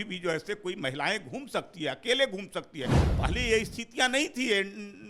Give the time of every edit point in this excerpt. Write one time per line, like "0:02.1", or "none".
0:03.0